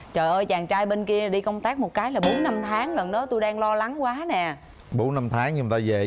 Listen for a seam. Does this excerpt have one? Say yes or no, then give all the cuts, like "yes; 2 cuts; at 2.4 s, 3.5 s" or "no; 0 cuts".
no; 0 cuts